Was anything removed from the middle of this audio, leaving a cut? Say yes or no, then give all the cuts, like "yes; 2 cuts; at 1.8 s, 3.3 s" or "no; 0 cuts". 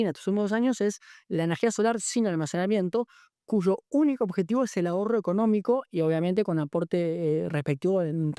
no; 0 cuts